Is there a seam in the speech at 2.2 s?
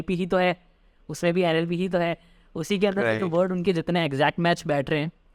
no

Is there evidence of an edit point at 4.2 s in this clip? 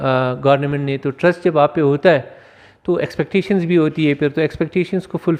no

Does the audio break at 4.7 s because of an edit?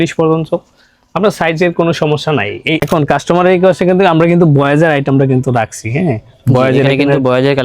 no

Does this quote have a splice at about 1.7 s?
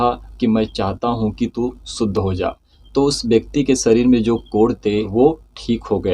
no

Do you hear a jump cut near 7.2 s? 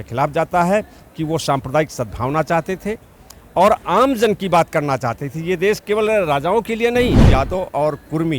yes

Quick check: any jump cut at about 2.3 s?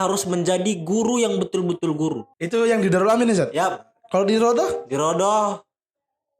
yes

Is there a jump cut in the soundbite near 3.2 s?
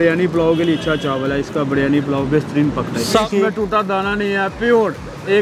yes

